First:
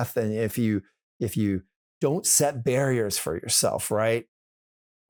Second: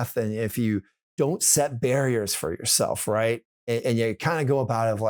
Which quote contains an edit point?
second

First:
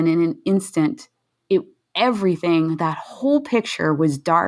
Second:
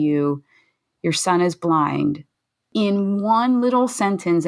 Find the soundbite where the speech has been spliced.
second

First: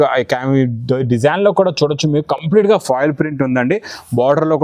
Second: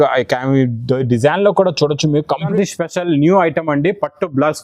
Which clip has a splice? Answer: second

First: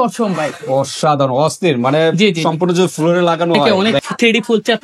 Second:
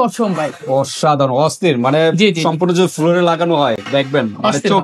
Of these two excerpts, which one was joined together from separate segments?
first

